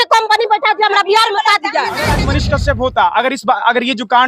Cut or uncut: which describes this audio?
cut